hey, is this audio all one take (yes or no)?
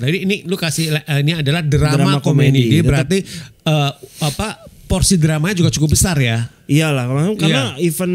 yes